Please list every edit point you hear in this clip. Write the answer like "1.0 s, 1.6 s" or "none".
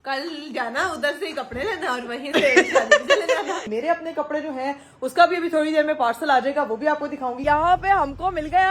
3.6 s, 7.4 s